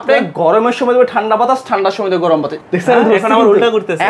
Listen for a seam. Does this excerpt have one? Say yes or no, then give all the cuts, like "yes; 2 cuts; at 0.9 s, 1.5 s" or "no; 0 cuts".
yes; 1 cut; at 2.5 s